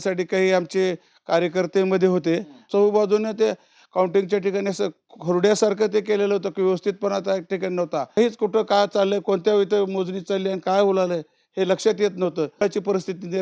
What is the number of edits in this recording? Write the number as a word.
three